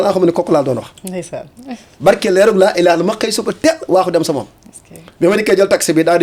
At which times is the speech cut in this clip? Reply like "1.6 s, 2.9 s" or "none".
none